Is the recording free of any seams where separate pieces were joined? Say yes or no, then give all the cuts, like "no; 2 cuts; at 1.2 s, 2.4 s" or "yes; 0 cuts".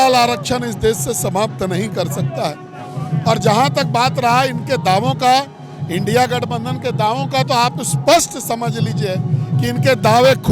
yes; 0 cuts